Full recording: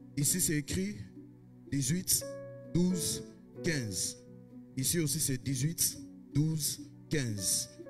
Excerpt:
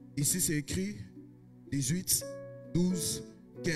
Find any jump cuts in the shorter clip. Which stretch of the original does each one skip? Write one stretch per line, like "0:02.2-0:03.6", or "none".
none